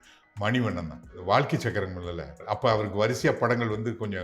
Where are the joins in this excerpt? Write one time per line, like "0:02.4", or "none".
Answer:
0:01.2
0:02.4